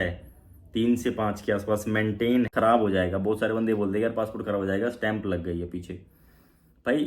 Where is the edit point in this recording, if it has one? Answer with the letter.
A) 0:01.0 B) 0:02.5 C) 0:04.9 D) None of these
B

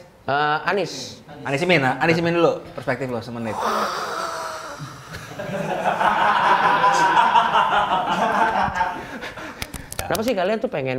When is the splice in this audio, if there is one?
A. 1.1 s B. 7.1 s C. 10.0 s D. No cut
C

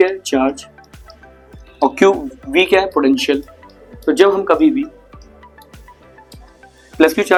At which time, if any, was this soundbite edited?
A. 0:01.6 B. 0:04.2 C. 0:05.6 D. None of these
D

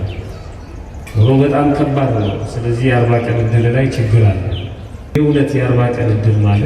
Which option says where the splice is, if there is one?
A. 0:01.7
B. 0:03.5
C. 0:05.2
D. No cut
C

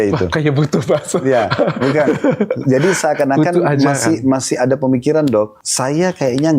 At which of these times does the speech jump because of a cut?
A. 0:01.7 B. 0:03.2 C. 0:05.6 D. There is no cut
C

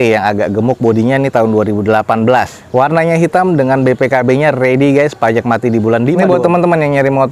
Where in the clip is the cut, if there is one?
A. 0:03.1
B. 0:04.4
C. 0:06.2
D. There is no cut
C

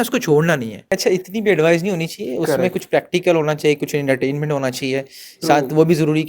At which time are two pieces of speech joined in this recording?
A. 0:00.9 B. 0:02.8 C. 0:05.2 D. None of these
A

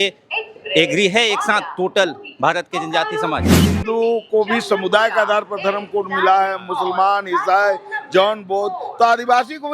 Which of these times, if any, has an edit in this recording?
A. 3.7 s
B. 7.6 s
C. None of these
A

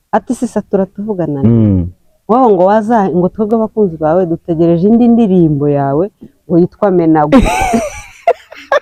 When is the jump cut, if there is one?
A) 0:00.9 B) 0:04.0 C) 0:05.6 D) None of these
D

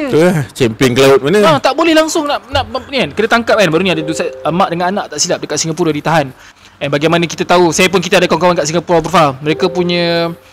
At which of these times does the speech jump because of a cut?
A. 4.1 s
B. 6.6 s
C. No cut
B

